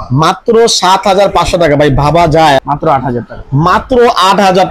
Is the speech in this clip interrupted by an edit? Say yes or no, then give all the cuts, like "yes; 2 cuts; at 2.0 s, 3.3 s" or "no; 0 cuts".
yes; 1 cut; at 2.6 s